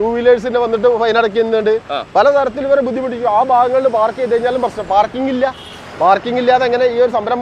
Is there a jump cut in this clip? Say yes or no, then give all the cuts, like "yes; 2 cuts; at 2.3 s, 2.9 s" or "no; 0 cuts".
no; 0 cuts